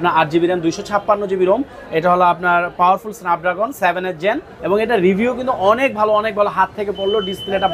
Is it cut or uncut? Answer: cut